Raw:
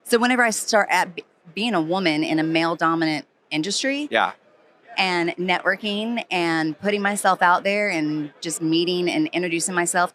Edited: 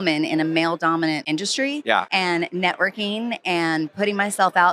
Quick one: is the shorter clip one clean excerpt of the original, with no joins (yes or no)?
no